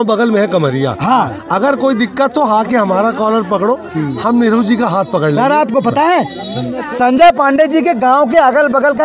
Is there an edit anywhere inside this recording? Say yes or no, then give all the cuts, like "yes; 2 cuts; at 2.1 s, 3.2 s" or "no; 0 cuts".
no; 0 cuts